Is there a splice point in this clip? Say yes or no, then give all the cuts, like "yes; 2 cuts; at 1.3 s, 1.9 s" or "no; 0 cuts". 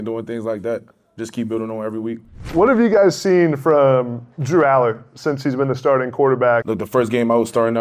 yes; 2 cuts; at 2.5 s, 6.6 s